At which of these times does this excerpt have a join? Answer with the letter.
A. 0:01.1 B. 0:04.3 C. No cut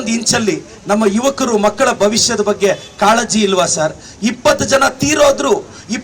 C